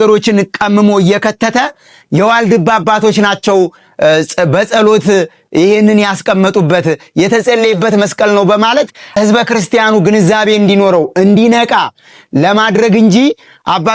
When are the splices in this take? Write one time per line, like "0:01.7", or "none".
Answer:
0:09.1